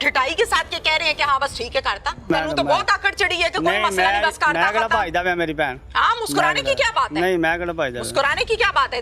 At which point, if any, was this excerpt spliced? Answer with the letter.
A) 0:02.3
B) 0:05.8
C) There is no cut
A